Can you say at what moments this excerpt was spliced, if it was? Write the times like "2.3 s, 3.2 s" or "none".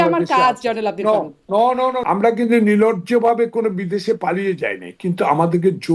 2.0 s

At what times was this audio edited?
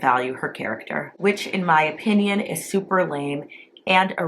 1.1 s

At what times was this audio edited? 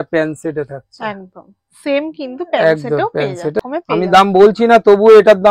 3.6 s

